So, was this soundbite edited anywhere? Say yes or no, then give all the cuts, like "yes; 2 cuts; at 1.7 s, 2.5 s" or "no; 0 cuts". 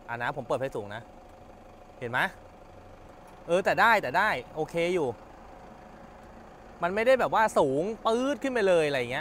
no; 0 cuts